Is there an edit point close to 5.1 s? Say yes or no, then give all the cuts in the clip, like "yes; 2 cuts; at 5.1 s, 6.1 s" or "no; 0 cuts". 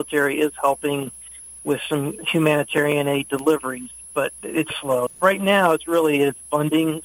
yes; 2 cuts; at 2.2 s, 5.1 s